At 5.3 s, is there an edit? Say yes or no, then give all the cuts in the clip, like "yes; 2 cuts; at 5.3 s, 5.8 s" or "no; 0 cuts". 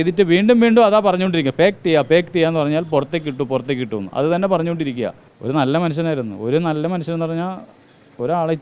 yes; 1 cut; at 5.3 s